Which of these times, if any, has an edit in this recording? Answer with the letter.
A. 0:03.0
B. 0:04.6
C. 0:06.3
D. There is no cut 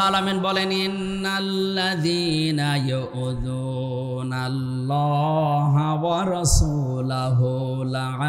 D